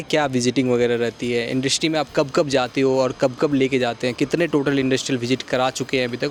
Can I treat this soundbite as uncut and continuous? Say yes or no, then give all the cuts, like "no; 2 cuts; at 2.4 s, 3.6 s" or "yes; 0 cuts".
yes; 0 cuts